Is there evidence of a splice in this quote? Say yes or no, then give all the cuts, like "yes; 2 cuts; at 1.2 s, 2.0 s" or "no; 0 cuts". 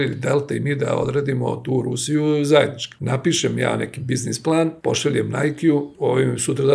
yes; 3 cuts; at 2.9 s, 4.8 s, 5.9 s